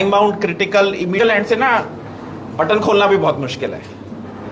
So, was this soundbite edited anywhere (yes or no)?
yes